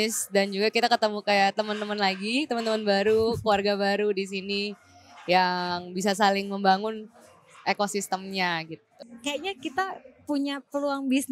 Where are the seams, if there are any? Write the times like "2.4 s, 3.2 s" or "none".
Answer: 9.1 s